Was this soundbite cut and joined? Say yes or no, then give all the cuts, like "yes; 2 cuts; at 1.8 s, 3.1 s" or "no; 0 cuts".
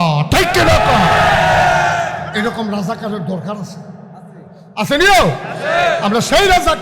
yes; 1 cut; at 2.2 s